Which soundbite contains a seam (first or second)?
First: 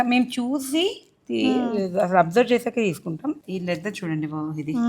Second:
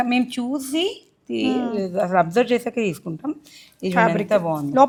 first